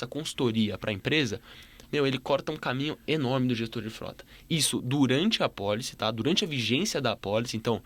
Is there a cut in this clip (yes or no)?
no